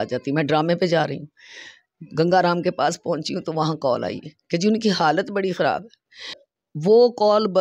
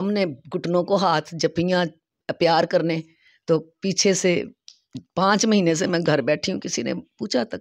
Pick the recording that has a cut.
first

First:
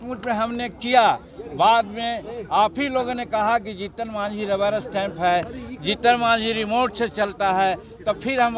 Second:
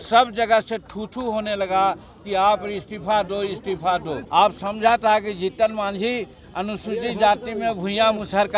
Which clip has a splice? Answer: second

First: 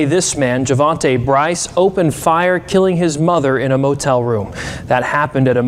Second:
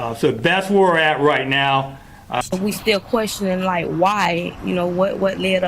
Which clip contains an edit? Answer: second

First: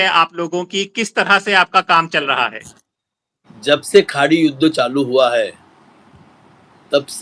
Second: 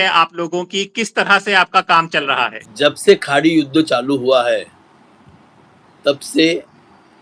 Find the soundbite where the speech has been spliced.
second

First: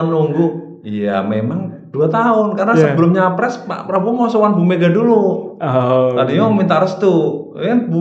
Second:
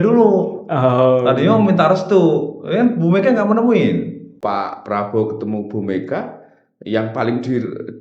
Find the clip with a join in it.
second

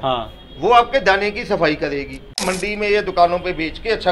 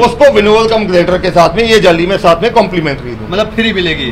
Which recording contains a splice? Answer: first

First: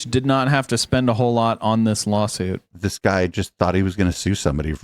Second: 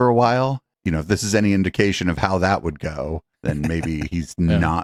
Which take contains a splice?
first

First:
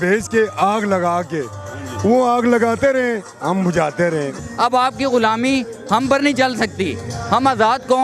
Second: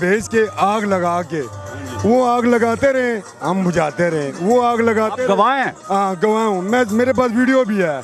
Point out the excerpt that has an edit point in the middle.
first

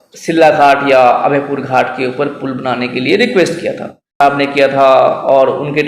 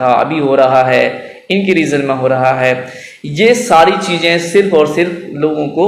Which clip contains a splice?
first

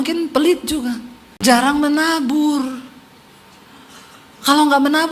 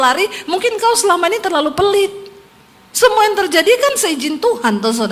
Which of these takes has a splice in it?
first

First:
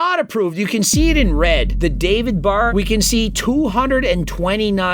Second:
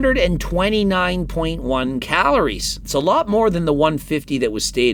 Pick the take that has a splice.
first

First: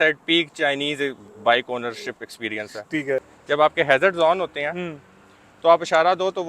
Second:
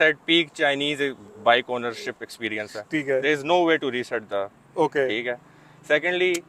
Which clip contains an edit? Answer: first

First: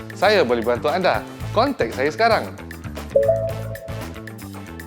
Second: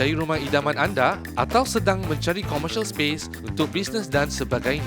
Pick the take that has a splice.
first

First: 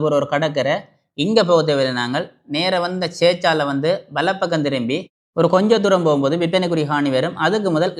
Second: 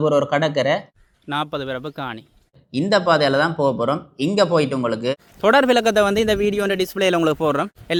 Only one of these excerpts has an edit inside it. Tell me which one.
first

